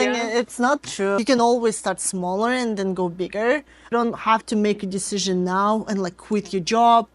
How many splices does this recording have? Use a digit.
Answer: 2